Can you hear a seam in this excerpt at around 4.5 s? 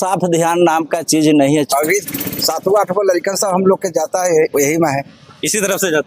no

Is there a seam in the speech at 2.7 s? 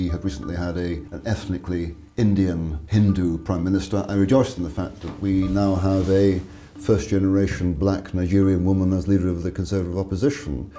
yes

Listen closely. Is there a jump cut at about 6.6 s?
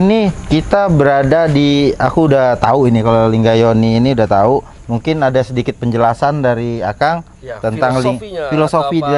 no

